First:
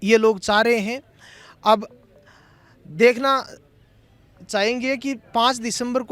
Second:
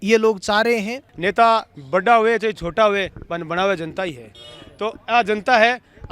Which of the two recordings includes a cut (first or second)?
second